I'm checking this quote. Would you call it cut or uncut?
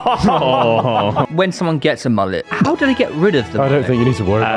cut